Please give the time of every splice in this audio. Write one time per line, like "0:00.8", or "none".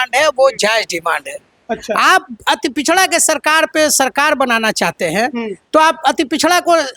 none